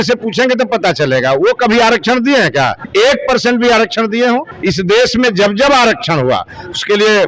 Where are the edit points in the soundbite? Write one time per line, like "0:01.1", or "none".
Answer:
0:02.8
0:04.5